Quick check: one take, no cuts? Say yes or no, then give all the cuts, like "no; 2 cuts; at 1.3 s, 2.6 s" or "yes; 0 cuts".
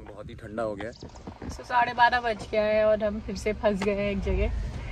no; 1 cut; at 1.1 s